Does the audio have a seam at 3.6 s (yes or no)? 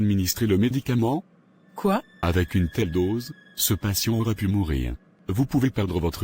no